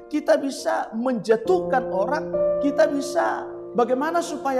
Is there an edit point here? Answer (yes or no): yes